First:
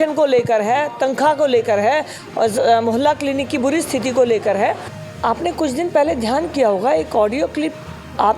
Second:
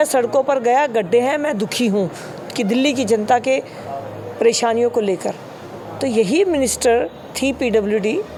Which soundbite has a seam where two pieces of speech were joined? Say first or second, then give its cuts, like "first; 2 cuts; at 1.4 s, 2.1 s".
first; 1 cut; at 4.9 s